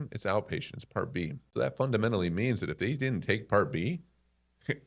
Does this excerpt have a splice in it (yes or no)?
yes